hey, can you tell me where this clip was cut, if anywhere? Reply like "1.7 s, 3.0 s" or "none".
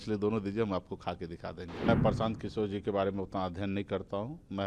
1.9 s